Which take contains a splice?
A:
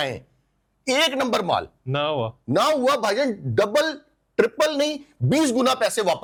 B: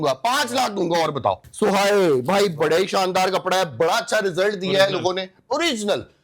B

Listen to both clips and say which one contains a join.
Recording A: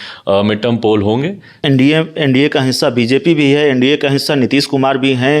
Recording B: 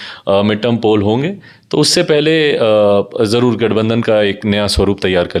A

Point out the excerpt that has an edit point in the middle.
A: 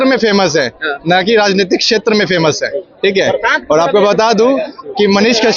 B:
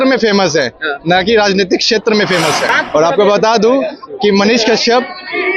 B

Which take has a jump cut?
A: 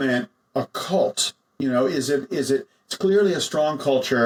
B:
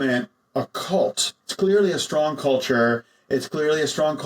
B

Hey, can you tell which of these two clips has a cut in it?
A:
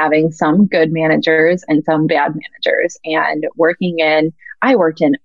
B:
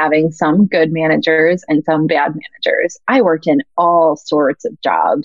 B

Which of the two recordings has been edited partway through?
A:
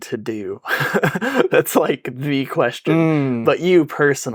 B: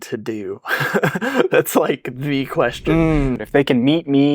B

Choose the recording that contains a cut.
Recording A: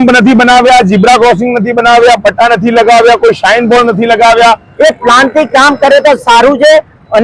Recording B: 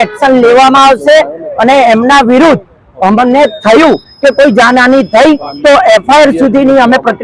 A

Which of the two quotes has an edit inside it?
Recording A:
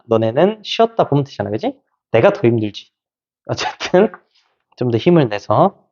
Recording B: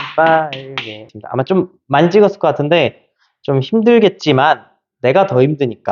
B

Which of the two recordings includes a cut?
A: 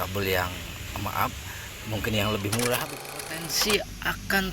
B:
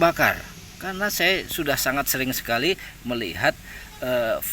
A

